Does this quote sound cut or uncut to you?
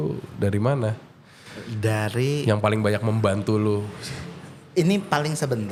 uncut